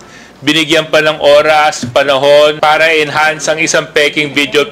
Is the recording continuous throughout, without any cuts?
no; 1 cut; at 2.6 s

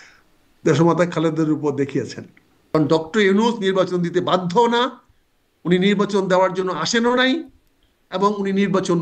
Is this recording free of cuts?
no; 1 cut; at 2.7 s

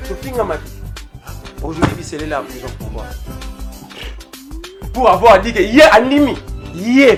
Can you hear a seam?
no; 0 cuts

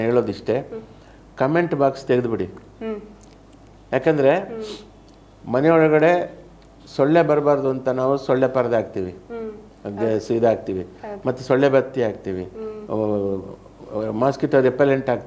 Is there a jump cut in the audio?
no; 0 cuts

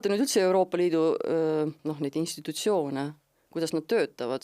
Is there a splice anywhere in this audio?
yes; 1 cut; at 1.8 s

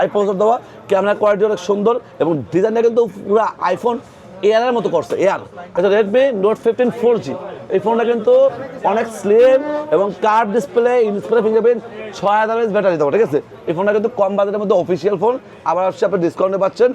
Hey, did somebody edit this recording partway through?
yes; 2 cuts; at 5.5 s, 13.5 s

